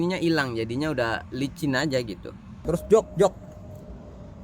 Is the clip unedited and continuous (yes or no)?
no